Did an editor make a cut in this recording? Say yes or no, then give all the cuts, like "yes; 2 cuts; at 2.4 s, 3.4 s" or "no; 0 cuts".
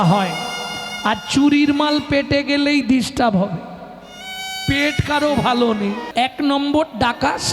yes; 1 cut; at 6.0 s